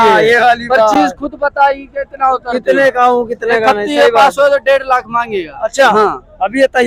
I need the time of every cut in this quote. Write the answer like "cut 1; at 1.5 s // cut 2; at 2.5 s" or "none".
none